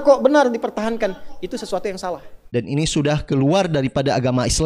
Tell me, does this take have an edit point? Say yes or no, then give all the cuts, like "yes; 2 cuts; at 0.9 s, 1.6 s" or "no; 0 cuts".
no; 0 cuts